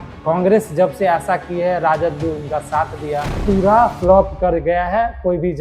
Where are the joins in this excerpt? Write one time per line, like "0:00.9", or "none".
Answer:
0:03.4